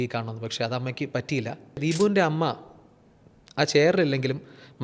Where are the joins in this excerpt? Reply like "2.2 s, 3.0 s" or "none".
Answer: 1.8 s